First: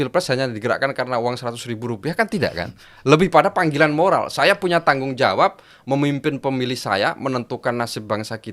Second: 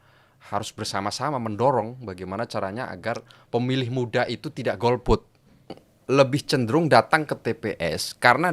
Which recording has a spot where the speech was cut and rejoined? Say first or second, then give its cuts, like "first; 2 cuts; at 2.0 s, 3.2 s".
second; 1 cut; at 5.9 s